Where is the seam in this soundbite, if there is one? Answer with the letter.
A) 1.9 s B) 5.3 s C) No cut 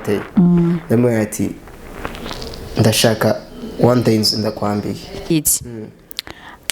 B